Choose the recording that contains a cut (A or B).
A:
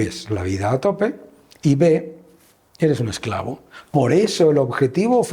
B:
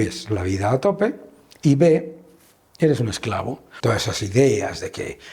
B